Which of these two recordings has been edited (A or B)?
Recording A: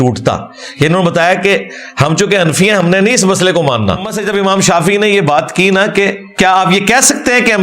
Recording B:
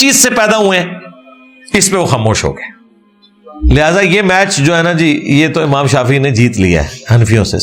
A